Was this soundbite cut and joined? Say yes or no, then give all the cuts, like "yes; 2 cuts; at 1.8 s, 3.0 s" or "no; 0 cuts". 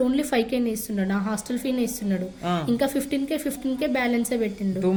no; 0 cuts